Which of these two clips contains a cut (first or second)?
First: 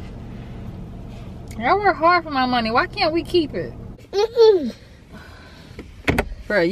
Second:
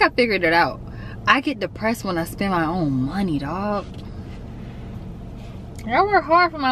first